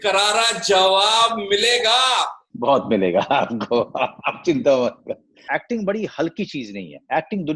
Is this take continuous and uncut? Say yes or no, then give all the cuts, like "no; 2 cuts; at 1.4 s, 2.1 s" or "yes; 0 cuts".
no; 2 cuts; at 2.4 s, 5.4 s